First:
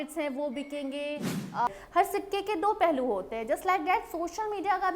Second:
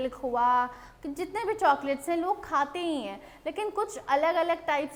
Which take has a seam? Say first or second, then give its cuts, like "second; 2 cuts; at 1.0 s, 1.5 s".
first; 1 cut; at 1.7 s